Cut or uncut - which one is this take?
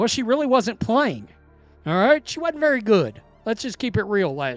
uncut